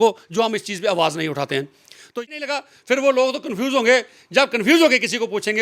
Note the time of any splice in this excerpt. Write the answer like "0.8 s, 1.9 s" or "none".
2.1 s